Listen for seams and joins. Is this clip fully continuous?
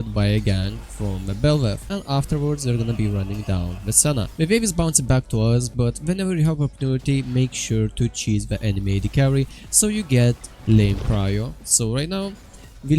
no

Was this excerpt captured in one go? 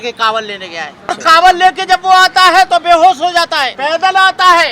no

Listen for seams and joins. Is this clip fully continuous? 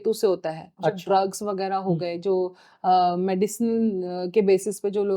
yes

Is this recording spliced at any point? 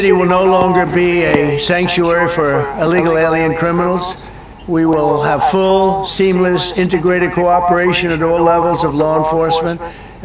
yes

